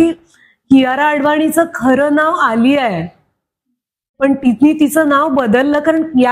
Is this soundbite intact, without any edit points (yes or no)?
yes